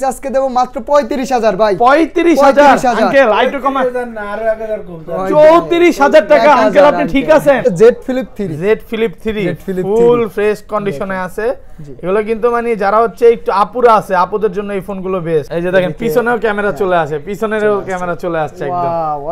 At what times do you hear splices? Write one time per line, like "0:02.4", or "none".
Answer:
0:07.7
0:15.5